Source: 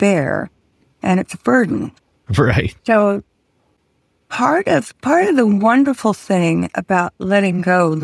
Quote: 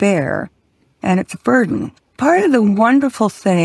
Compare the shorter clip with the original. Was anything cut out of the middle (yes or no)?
yes